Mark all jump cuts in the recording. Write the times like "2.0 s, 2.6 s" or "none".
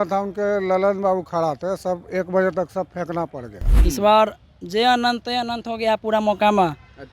3.7 s